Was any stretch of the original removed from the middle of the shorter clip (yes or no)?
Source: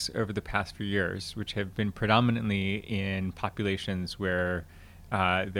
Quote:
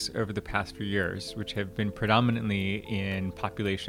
no